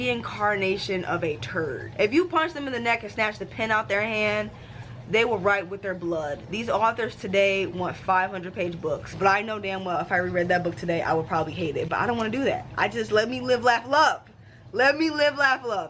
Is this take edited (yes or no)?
yes